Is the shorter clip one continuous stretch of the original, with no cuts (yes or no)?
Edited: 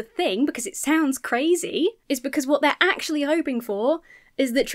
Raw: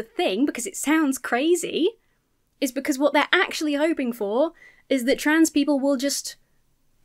no